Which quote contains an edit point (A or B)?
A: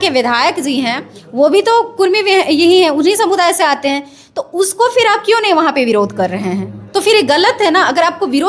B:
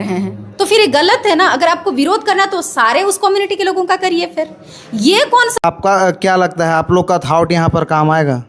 B